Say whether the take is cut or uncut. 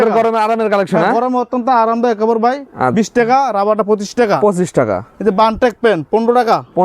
uncut